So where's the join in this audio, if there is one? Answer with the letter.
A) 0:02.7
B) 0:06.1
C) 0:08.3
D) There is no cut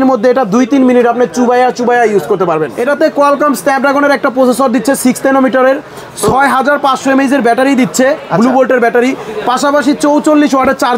A